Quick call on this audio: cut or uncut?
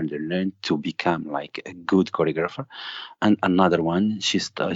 uncut